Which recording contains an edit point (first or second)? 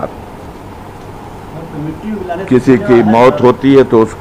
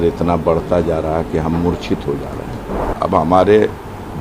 second